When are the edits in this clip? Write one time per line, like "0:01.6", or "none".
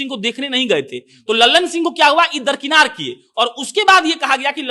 none